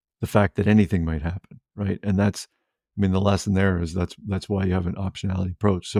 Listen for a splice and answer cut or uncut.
uncut